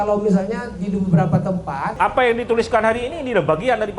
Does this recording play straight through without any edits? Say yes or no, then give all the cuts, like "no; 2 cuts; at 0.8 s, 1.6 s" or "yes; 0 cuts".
no; 1 cut; at 1.9 s